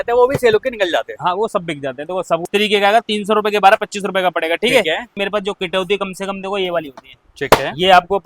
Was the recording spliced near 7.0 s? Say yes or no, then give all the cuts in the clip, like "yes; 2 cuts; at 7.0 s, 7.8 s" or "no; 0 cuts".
no; 2 cuts; at 2.5 s, 5.1 s